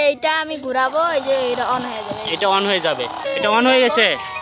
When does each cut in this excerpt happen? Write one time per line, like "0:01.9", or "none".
0:03.2